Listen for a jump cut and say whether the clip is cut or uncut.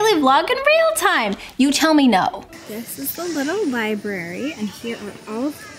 cut